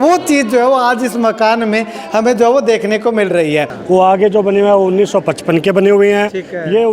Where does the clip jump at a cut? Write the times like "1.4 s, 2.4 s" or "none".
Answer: 3.7 s